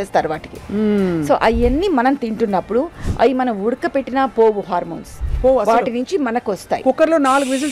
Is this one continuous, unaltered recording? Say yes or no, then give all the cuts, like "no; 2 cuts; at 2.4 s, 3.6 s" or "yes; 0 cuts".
yes; 0 cuts